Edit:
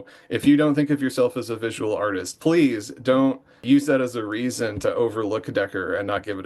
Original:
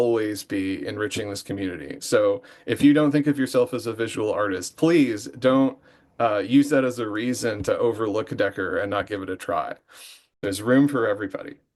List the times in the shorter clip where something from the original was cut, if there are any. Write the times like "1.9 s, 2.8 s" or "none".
3.6 s